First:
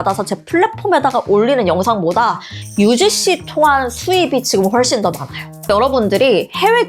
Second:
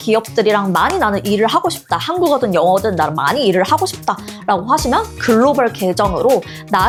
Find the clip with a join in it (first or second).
first